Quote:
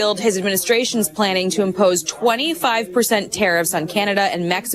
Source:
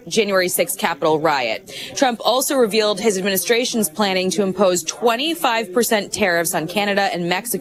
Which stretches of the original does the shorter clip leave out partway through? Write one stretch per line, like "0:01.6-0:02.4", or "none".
none